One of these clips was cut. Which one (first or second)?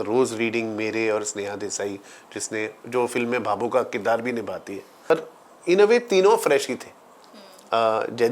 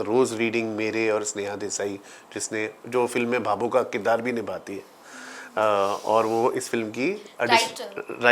first